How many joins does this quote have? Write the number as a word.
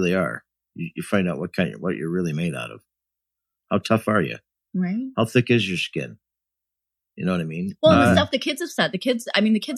one